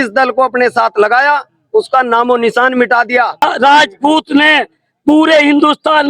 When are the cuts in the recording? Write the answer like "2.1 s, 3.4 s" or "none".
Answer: 3.4 s